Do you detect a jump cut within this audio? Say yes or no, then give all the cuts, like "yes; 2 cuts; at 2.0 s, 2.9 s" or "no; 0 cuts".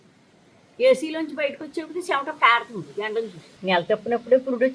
yes; 1 cut; at 3.6 s